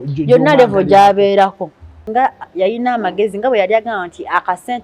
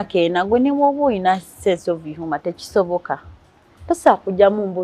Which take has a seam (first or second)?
first